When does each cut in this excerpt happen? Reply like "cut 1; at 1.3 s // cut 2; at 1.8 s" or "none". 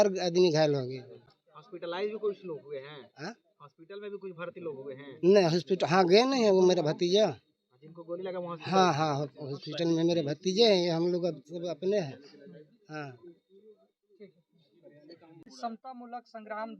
none